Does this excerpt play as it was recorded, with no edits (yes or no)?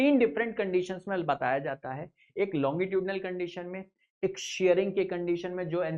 yes